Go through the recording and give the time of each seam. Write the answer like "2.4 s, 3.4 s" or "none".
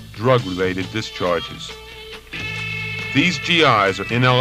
1.3 s